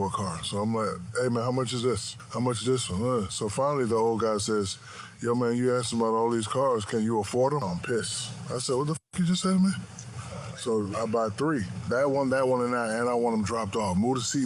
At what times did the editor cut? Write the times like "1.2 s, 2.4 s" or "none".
7.6 s